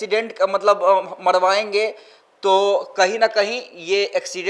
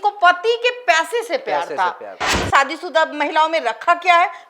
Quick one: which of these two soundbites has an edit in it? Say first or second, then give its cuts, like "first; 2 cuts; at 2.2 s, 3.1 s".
second; 1 cut; at 2.3 s